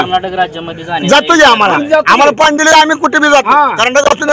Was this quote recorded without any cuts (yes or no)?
yes